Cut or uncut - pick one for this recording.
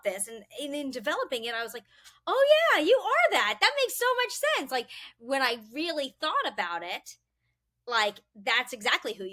uncut